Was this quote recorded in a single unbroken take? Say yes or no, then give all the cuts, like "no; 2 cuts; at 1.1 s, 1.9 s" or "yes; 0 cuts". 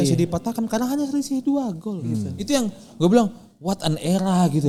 yes; 0 cuts